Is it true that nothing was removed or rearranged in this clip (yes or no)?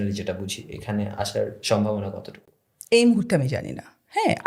yes